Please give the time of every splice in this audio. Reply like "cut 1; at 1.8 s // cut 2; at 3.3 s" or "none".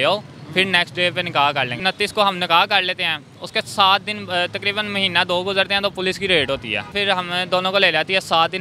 cut 1; at 1.8 s // cut 2; at 6.9 s